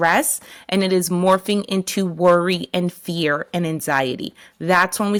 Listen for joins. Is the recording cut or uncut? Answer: uncut